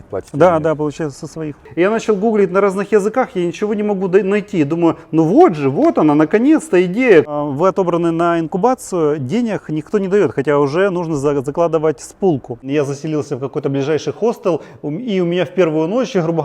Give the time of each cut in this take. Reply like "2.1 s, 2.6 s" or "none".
1.6 s, 7.3 s, 12.6 s